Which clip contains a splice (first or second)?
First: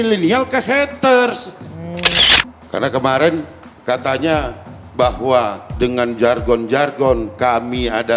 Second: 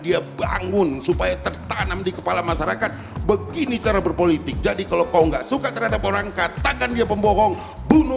first